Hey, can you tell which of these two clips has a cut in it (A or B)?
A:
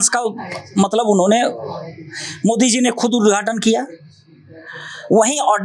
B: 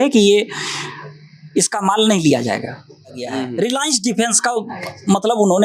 B